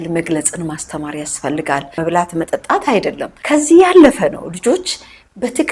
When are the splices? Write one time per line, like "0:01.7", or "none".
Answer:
0:02.0
0:03.3